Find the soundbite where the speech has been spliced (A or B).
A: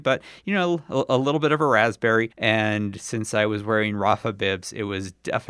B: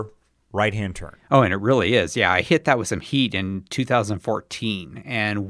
A